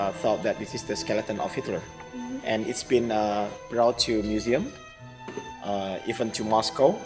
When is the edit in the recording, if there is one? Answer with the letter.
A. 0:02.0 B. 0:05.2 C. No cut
C